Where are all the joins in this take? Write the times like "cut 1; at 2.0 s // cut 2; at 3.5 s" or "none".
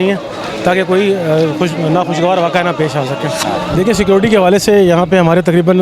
cut 1; at 3.8 s